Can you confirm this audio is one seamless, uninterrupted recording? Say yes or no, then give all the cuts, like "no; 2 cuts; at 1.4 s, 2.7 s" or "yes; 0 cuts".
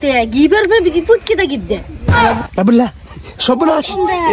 no; 1 cut; at 1.9 s